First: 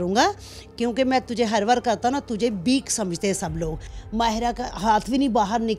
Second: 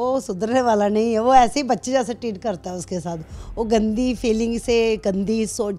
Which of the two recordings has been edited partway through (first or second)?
first